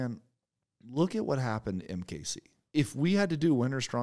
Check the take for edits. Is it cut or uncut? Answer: cut